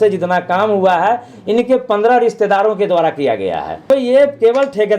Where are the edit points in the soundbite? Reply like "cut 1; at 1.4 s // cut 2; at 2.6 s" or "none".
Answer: cut 1; at 3.9 s